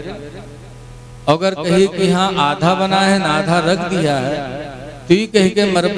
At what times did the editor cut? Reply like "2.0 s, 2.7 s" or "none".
none